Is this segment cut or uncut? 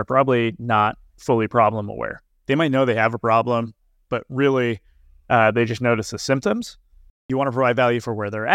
cut